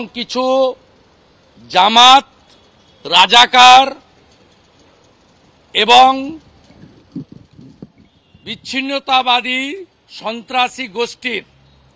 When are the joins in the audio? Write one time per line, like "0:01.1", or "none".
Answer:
none

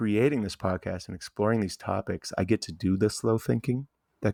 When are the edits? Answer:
none

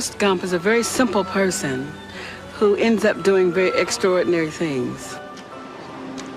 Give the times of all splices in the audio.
0:02.9

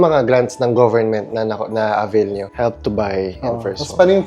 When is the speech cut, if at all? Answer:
0:02.5

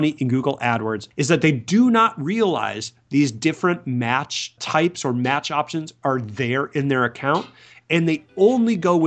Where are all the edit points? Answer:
0:01.0
0:04.6

